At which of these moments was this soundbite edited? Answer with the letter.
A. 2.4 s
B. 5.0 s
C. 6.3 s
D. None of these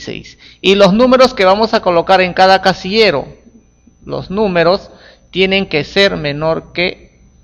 A